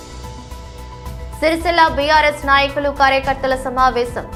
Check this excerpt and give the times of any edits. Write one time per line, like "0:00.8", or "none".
none